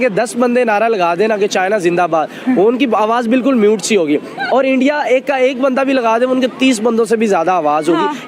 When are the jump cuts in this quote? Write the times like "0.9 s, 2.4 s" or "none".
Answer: none